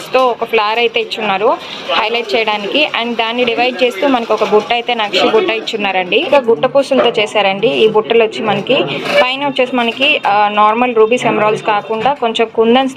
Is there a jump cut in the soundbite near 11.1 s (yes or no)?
no